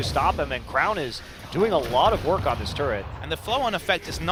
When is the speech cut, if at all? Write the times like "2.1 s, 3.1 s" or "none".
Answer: none